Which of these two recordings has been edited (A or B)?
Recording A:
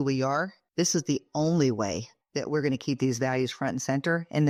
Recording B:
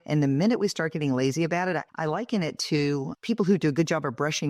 B